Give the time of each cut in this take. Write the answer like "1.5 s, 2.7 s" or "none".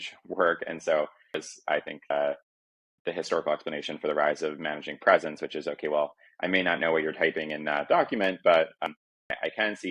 1.5 s, 8.9 s